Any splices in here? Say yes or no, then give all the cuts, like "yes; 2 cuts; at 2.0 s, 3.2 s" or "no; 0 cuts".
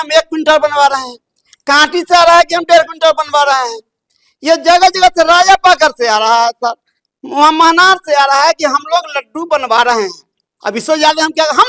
no; 0 cuts